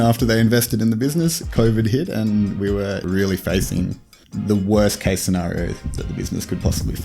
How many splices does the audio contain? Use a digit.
1